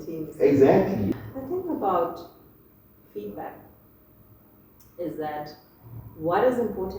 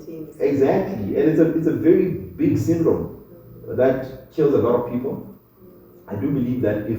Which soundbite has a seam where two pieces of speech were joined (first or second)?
first